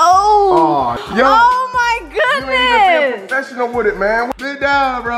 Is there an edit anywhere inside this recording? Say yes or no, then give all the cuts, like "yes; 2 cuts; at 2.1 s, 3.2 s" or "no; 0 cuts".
yes; 2 cuts; at 1.0 s, 4.3 s